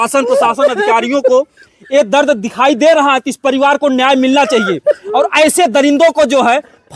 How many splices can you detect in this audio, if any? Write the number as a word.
zero